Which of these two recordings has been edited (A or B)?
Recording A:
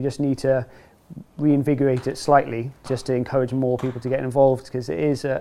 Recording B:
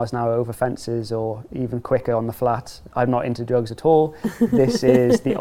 B